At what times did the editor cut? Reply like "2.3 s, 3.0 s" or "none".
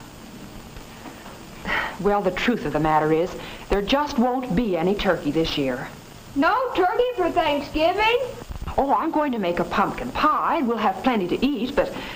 none